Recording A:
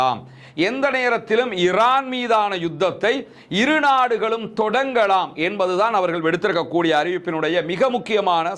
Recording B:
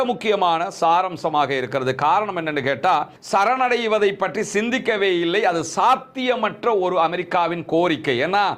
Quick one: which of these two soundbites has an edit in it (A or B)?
B